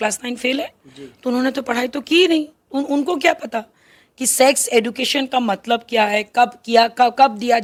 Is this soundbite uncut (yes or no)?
yes